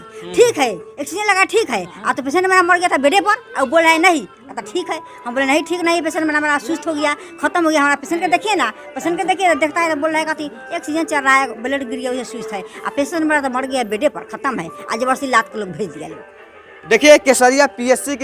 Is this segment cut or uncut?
uncut